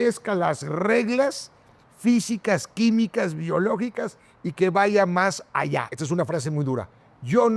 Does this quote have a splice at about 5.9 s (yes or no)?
yes